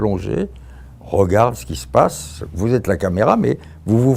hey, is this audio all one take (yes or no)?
yes